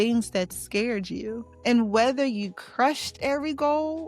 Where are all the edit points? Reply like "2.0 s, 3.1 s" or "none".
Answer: 1.5 s